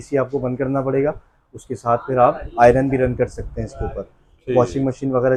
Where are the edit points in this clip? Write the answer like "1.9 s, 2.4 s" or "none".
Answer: none